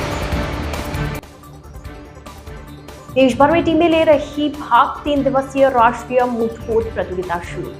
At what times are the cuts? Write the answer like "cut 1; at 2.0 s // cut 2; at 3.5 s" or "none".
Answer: cut 1; at 2.8 s

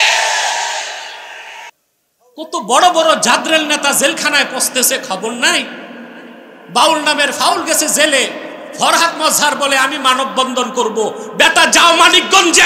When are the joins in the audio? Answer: cut 1; at 1.7 s

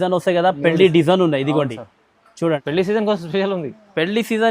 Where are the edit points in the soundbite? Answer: cut 1; at 2.6 s

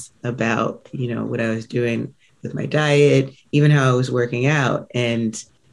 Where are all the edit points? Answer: none

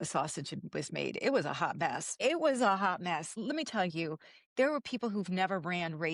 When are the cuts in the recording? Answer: cut 1; at 2.1 s // cut 2; at 3.3 s

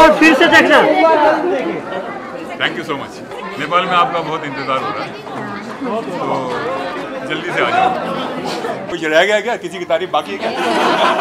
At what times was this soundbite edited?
cut 1; at 3.3 s // cut 2; at 8.9 s

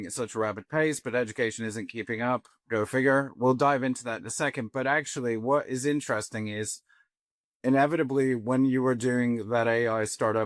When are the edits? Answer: none

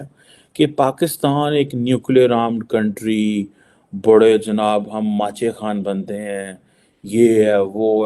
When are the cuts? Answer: none

